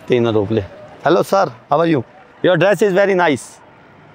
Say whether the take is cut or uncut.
uncut